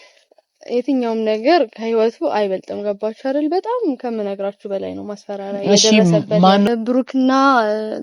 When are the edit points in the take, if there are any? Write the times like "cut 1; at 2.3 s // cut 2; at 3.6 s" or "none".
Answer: cut 1; at 6.7 s